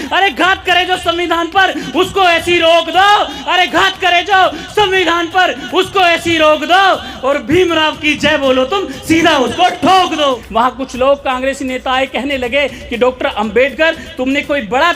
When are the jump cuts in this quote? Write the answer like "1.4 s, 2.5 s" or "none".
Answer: 10.4 s